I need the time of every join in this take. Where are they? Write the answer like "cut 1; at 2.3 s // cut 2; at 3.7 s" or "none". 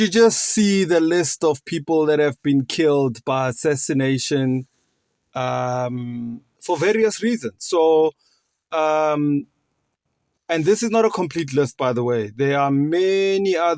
none